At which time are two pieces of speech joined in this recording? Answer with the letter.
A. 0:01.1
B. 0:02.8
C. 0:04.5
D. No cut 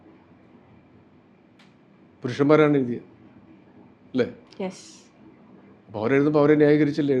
D